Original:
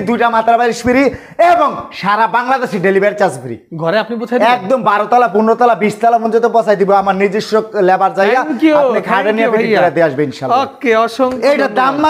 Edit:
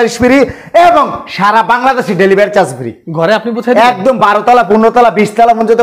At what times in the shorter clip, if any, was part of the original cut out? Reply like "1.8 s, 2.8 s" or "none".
none